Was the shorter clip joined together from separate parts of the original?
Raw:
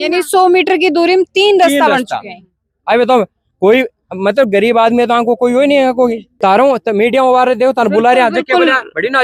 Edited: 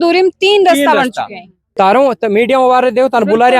yes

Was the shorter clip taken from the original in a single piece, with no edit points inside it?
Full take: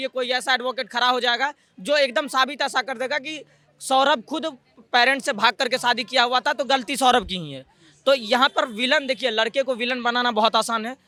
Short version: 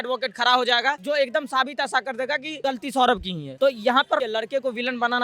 no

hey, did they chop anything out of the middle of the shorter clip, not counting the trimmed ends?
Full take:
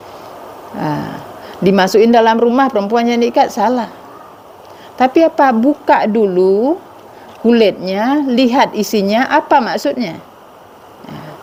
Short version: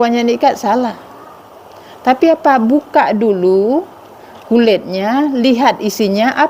no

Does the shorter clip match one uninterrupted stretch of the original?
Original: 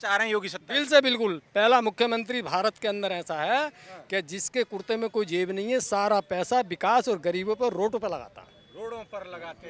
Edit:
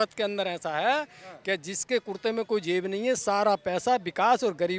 yes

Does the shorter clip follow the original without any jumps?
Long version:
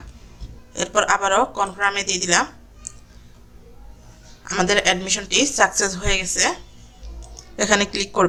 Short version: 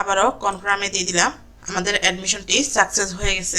no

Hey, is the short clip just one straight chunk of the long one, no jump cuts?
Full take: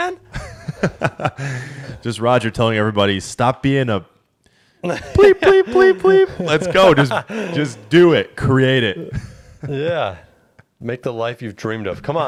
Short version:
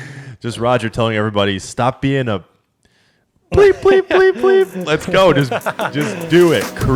yes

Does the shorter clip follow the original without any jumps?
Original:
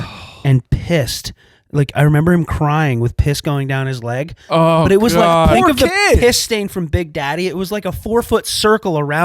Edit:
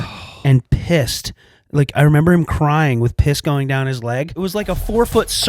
no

